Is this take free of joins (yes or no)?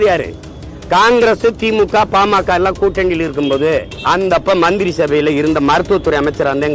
no